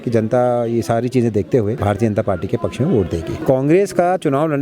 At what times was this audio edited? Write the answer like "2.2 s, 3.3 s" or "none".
1.8 s, 3.4 s